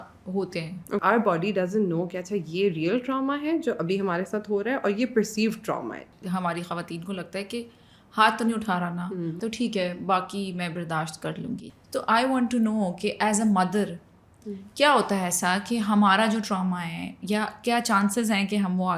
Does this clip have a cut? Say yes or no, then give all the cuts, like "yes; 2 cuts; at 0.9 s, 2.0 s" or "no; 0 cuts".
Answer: yes; 4 cuts; at 1.0 s, 6.1 s, 9.4 s, 11.6 s